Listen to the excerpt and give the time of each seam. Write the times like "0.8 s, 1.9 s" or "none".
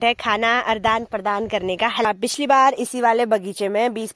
2.0 s